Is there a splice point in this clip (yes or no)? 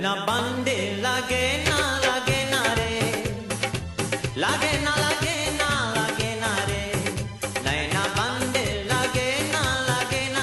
no